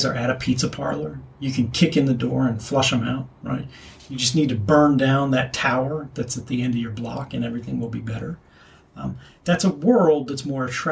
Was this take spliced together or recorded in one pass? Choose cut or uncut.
uncut